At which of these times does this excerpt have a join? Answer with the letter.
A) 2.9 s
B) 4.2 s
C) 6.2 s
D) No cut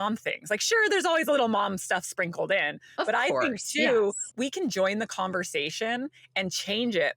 B